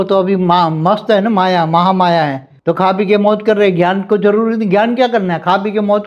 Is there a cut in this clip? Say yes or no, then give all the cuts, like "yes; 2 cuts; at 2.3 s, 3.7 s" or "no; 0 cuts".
yes; 1 cut; at 2.5 s